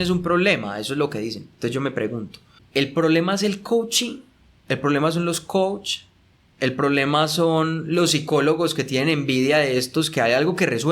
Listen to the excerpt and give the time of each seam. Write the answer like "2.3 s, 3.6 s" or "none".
2.5 s